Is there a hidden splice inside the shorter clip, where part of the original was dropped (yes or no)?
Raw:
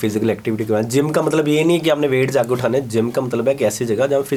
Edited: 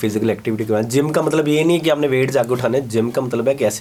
no